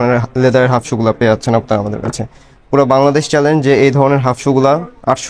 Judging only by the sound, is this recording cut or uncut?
uncut